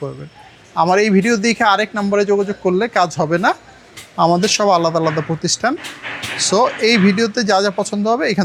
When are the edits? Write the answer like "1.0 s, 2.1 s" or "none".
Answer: none